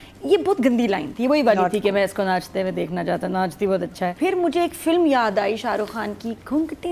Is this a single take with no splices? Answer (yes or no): no